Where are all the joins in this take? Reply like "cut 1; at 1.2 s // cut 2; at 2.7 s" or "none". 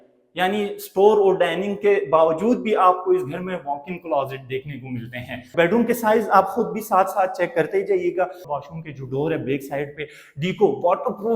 cut 1; at 5.5 s // cut 2; at 8.4 s